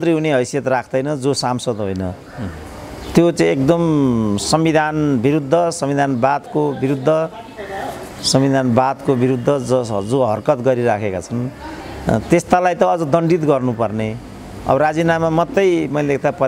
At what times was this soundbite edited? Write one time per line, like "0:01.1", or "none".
none